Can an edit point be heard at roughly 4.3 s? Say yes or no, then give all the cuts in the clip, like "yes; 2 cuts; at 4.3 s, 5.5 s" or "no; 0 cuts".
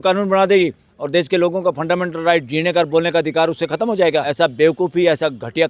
yes; 1 cut; at 4.3 s